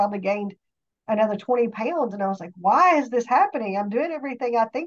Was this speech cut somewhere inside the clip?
no; 0 cuts

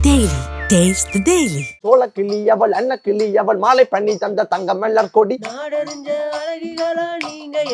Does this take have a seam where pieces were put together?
yes; 1 cut; at 1.7 s

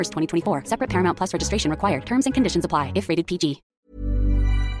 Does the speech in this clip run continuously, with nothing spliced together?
no; 1 cut; at 3.7 s

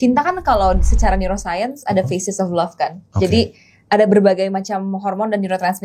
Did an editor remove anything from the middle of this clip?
no; 0 cuts

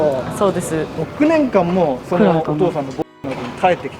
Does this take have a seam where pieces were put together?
yes; 1 cut; at 1.0 s

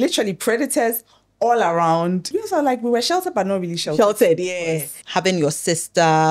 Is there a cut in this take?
yes; 2 cuts; at 2.3 s, 4.9 s

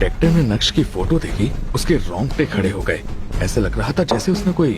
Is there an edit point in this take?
no; 0 cuts

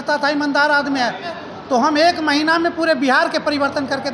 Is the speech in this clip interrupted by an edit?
yes; 1 cut; at 1.4 s

